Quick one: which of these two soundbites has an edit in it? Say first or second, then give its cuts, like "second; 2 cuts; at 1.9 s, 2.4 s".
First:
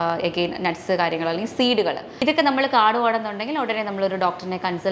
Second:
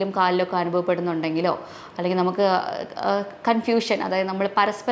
first; 1 cut; at 2.1 s